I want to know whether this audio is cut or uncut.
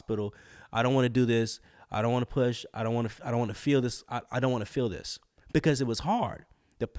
uncut